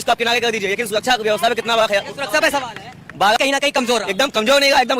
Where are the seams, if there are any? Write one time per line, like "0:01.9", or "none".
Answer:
0:03.4